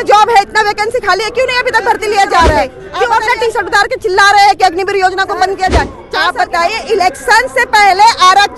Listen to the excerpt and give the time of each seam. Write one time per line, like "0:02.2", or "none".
0:02.8
0:06.0